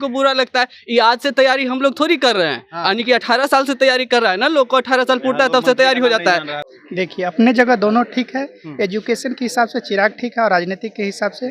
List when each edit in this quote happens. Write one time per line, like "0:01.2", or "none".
0:06.6